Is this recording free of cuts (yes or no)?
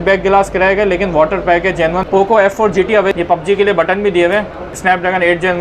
no